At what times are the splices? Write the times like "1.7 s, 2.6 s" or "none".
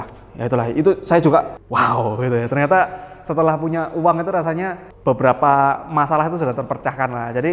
1.5 s, 4.8 s